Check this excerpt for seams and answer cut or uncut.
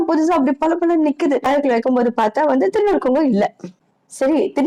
cut